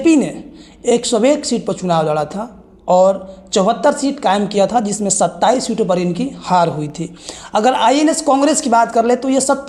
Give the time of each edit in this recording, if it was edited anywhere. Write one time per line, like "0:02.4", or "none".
none